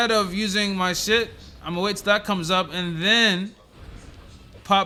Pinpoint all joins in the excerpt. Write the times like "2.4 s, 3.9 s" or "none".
none